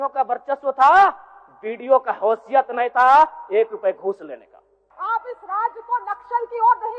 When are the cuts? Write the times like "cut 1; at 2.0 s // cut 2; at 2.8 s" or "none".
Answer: cut 1; at 4.8 s